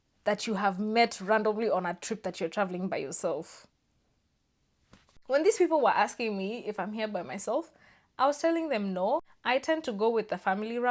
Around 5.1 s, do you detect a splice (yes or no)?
yes